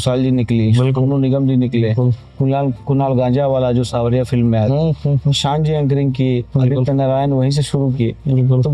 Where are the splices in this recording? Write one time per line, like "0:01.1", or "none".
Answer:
none